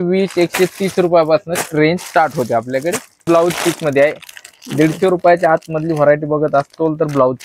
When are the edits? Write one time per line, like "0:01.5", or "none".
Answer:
0:03.2